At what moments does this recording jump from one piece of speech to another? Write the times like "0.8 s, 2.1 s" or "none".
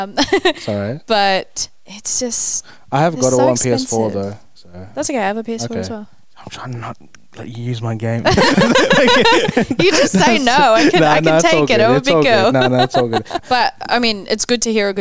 none